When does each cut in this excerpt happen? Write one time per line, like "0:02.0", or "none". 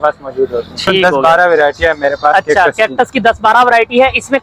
0:01.0